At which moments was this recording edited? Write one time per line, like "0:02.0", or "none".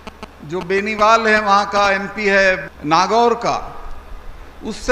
0:02.7